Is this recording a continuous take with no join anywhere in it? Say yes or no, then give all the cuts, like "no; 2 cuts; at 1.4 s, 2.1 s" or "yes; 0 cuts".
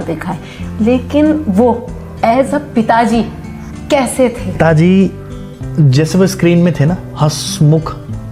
no; 1 cut; at 4.6 s